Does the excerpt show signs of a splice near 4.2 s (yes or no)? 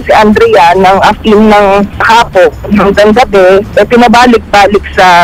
no